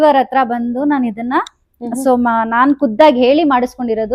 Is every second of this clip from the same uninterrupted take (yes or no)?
yes